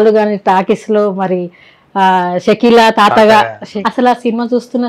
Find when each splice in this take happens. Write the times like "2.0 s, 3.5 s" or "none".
3.7 s